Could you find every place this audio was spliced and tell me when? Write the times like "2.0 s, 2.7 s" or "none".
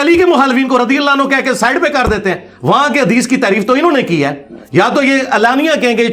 none